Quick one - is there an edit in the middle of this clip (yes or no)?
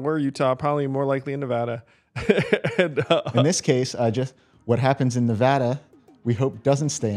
no